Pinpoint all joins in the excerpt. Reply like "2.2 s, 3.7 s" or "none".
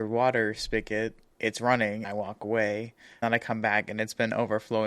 1.3 s, 2.1 s, 3.2 s